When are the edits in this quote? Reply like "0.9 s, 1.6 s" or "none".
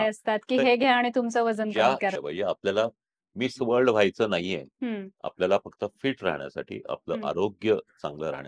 2.2 s, 5.1 s